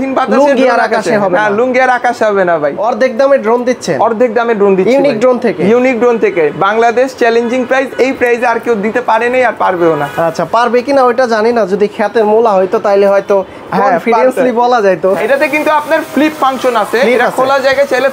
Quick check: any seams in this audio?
yes; 2 cuts; at 2.8 s, 15.2 s

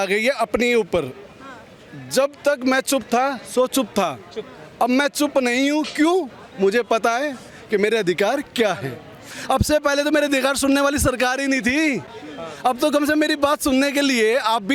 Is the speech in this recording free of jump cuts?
yes; 0 cuts

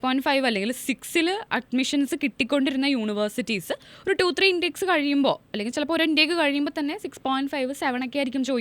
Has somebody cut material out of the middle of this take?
no; 0 cuts

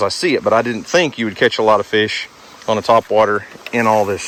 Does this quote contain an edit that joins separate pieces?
no; 0 cuts

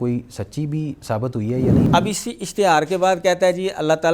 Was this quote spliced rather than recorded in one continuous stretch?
yes; 1 cut; at 1.8 s

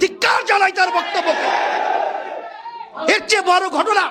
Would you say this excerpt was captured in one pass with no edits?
yes; 0 cuts

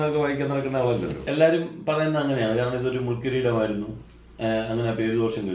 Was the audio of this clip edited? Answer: yes; 1 cut; at 1.2 s

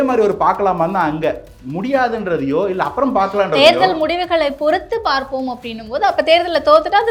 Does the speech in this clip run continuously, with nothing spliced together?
yes; 0 cuts

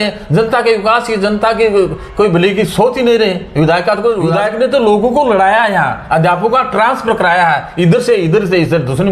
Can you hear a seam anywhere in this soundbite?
yes; 1 cut; at 4.3 s

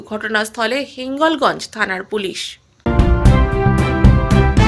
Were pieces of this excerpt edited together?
yes; 1 cut; at 2.9 s

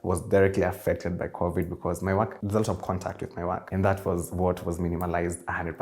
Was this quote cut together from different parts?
yes; 2 cuts; at 2.4 s, 3.6 s

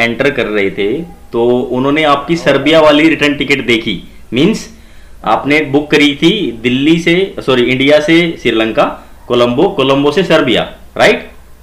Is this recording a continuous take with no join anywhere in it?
yes; 0 cuts

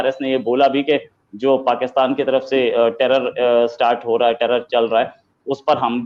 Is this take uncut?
yes; 0 cuts

